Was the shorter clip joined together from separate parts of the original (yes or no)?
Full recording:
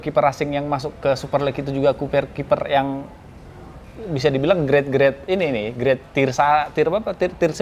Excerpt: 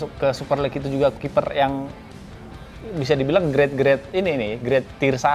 yes